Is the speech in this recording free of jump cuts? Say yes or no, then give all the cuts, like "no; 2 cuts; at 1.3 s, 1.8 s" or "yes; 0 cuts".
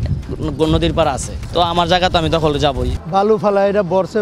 no; 2 cuts; at 1.3 s, 2.9 s